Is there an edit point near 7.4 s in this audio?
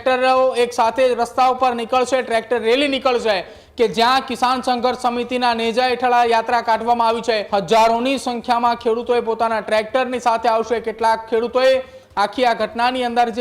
yes; 1 cut; at 7.4 s

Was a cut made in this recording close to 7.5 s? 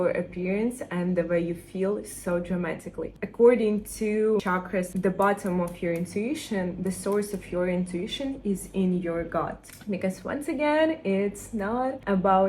no; 3 cuts; at 3.2 s, 4.6 s, 9.7 s

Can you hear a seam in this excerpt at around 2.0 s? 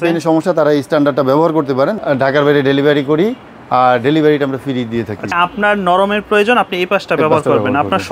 yes; 2 cuts; at 2.0 s, 5.3 s

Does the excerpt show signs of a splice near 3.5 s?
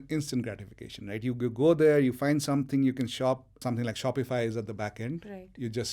yes; 1 cut; at 3.5 s

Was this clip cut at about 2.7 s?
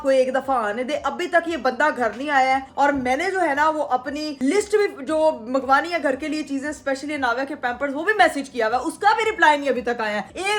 no; 0 cuts

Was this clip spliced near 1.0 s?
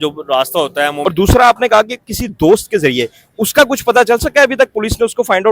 yes; 1 cut; at 1.0 s

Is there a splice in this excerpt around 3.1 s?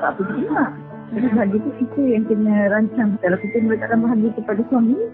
yes; 1 cut; at 3.1 s

